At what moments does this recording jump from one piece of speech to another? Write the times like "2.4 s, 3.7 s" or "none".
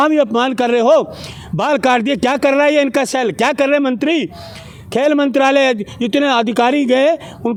none